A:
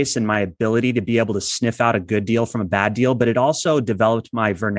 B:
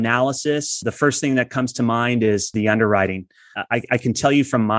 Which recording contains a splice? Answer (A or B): B